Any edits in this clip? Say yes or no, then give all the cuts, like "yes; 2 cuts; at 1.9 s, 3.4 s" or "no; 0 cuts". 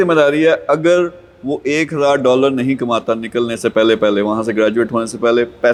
no; 0 cuts